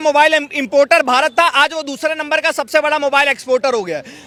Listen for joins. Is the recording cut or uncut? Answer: uncut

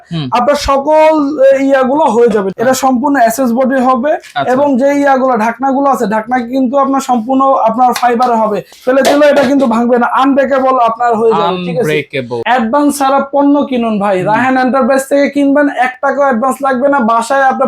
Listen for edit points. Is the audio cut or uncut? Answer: cut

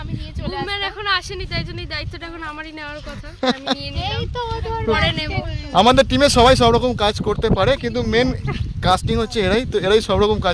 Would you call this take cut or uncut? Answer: uncut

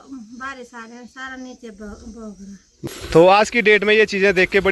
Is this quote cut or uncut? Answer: cut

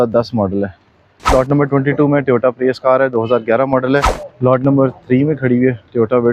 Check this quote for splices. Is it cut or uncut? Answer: cut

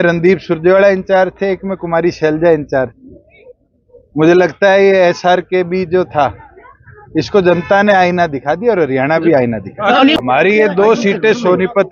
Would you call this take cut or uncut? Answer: cut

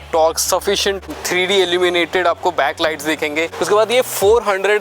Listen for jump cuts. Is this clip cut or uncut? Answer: cut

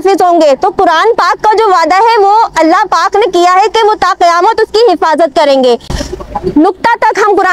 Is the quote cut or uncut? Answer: uncut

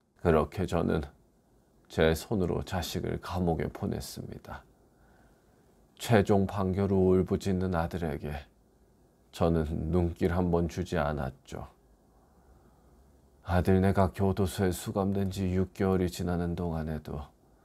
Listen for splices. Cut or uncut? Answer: uncut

